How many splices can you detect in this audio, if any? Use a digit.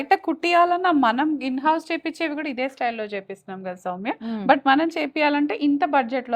0